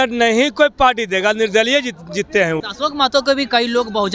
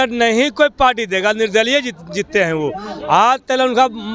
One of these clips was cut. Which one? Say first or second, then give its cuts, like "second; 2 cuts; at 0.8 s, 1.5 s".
first; 1 cut; at 2.6 s